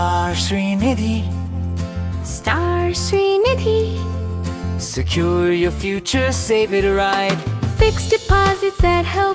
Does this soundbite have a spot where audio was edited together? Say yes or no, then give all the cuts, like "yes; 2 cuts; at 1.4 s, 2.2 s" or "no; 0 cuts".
no; 0 cuts